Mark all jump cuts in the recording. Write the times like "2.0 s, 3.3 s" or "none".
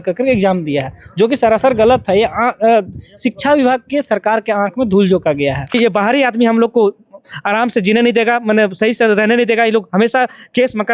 5.7 s